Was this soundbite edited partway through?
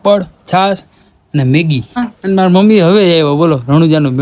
yes; 1 cut; at 1.9 s

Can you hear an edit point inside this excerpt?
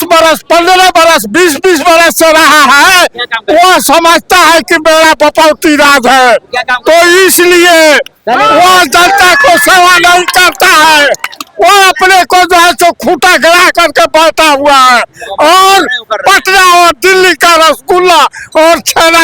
no; 0 cuts

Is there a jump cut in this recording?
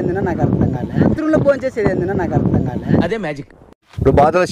no; 0 cuts

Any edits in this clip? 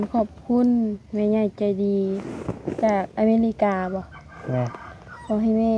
no; 0 cuts

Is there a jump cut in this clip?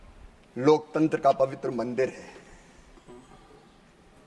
no; 0 cuts

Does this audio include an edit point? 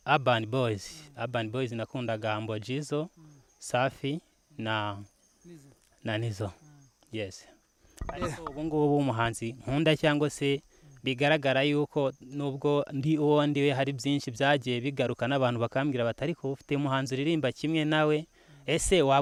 no; 0 cuts

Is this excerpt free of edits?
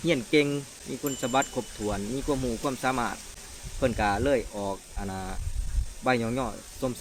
yes; 0 cuts

